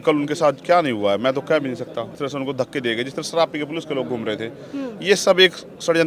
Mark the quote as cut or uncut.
cut